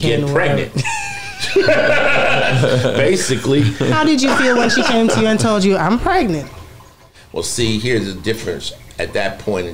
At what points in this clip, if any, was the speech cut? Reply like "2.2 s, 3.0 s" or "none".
none